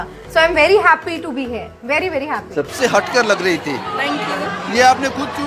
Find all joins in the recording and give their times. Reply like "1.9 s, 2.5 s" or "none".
2.7 s